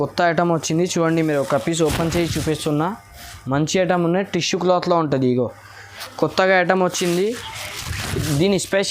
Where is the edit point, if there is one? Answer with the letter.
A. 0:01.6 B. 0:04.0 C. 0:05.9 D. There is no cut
C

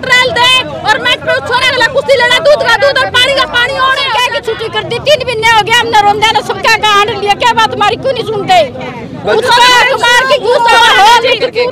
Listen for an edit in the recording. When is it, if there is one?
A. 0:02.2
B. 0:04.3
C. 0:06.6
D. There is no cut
B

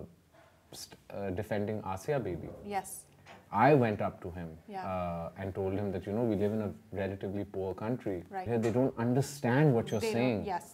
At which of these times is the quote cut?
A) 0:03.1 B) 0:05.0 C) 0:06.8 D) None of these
D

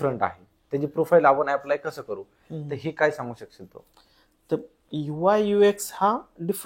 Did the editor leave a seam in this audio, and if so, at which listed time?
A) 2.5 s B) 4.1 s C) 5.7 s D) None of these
D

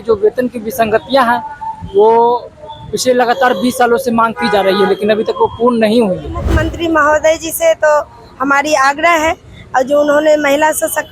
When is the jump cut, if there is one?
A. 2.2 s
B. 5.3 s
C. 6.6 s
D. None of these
C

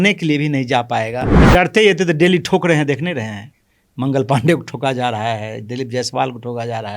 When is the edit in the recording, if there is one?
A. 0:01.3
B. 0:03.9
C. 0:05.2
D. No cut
A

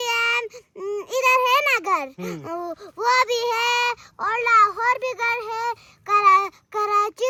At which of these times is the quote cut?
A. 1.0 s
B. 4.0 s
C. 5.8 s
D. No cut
D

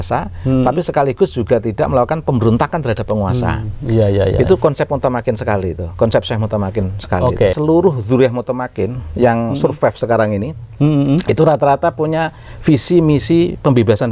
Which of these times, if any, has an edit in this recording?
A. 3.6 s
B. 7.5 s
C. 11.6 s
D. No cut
B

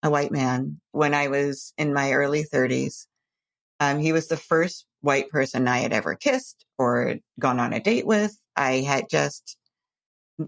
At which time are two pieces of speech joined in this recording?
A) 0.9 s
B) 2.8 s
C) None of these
A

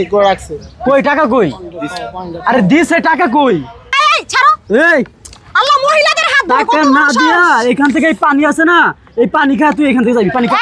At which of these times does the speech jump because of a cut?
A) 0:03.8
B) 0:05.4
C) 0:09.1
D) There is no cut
A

